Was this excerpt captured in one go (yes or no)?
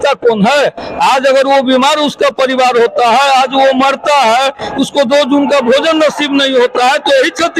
yes